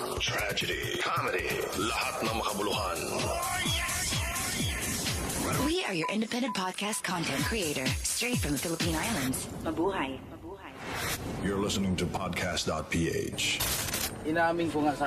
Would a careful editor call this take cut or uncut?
cut